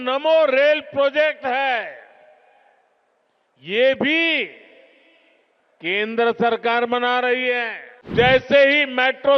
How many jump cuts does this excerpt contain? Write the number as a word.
one